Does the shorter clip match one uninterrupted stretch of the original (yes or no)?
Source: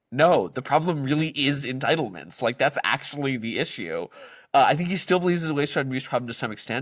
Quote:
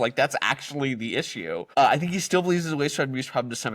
no